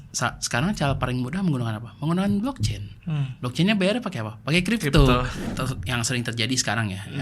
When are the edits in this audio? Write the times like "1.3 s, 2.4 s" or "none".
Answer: 5.3 s